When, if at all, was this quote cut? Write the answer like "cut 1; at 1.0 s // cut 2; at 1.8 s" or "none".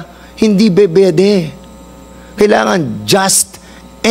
none